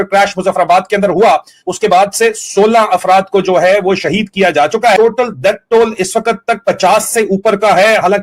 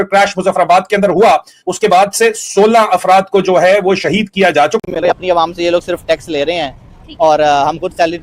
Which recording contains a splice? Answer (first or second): second